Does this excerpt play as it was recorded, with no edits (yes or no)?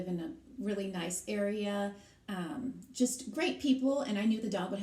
yes